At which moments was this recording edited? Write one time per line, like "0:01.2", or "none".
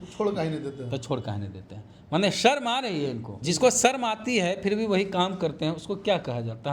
0:03.3